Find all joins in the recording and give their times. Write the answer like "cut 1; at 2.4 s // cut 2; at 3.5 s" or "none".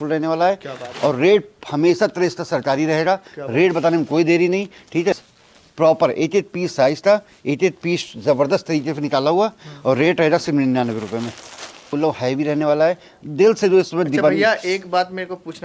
cut 1; at 5.2 s // cut 2; at 11.9 s